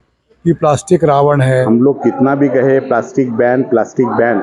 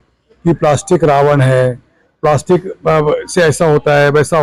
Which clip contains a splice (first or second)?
first